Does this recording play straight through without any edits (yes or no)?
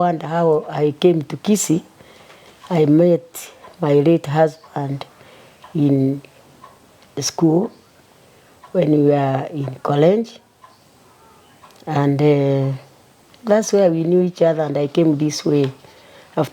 yes